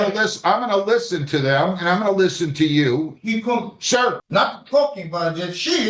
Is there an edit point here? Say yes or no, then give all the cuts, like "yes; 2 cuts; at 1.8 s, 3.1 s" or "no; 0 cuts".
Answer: yes; 1 cut; at 4.2 s